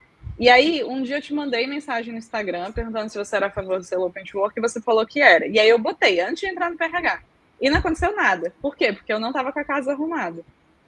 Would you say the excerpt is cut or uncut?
uncut